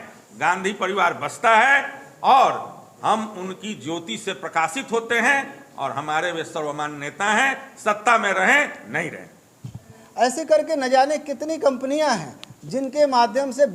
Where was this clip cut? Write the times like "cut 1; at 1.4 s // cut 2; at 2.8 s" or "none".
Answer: cut 1; at 10.0 s